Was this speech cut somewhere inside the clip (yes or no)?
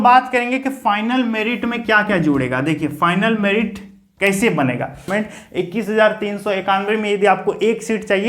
yes